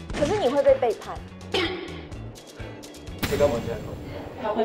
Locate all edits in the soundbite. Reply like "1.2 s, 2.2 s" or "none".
none